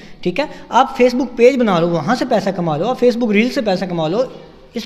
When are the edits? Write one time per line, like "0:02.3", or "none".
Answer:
none